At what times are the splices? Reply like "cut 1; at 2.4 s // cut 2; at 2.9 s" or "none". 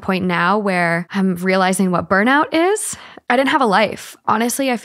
cut 1; at 1.1 s // cut 2; at 3.2 s